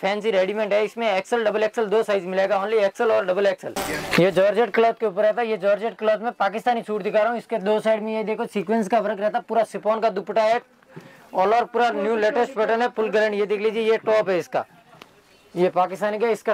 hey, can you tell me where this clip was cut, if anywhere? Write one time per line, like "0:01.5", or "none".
none